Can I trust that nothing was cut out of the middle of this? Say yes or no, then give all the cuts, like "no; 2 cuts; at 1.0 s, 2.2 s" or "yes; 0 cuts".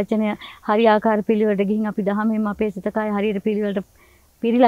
yes; 0 cuts